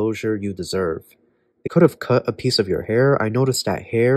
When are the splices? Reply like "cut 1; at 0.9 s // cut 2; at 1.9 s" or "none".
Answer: cut 1; at 1.7 s